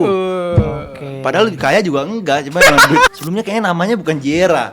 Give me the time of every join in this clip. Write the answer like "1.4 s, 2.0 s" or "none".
3.1 s